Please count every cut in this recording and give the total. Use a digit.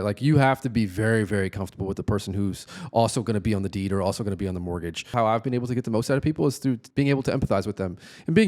2